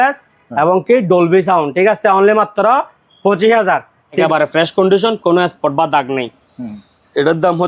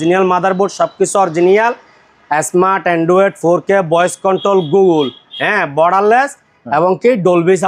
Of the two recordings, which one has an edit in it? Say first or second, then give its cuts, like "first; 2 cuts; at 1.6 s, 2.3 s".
first; 1 cut; at 4.2 s